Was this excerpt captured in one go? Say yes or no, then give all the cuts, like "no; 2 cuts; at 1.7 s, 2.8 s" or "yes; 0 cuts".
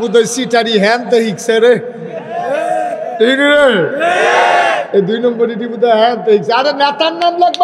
yes; 0 cuts